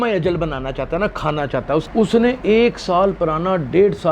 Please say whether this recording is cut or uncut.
cut